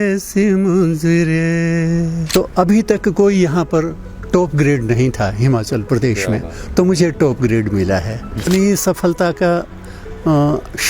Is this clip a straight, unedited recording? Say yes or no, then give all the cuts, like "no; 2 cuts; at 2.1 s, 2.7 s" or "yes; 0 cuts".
no; 2 cuts; at 2.2 s, 8.4 s